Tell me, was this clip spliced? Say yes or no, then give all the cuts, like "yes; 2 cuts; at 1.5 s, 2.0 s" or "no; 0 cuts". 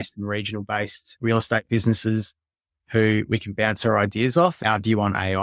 yes; 2 cuts; at 1.0 s, 4.6 s